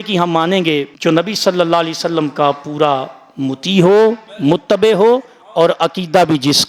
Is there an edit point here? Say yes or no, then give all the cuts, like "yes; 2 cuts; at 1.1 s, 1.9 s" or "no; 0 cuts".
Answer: no; 0 cuts